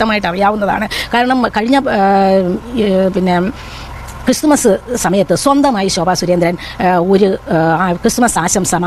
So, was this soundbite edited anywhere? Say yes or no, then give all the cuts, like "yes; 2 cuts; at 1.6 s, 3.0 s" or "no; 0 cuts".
no; 0 cuts